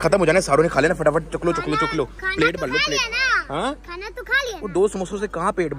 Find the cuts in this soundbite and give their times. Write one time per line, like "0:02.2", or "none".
none

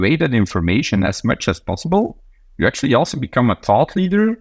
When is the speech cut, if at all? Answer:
none

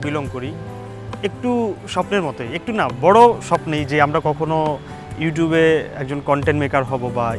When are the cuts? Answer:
none

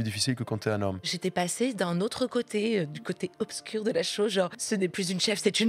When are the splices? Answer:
0:01.1
0:04.6

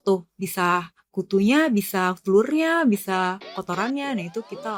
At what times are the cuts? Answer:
none

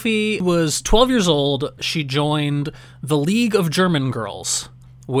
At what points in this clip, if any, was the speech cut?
none

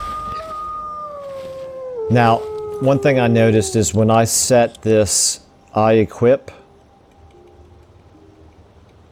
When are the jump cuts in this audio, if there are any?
none

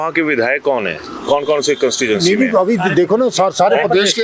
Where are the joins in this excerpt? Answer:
none

